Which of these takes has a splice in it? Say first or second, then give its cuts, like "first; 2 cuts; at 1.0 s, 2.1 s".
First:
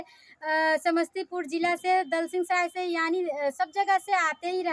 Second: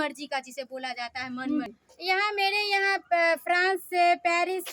second; 1 cut; at 1.8 s